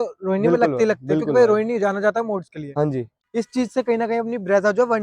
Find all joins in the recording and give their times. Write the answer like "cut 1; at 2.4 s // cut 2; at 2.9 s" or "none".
cut 1; at 3.1 s